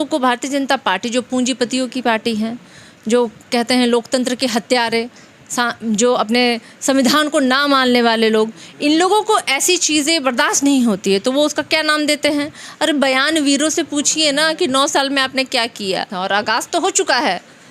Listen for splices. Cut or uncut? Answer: cut